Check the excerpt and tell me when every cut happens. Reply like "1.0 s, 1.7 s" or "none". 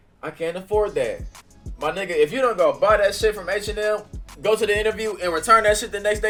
none